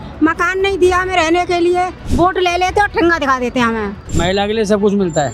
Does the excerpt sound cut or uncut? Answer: cut